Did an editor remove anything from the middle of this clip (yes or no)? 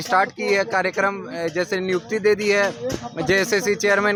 no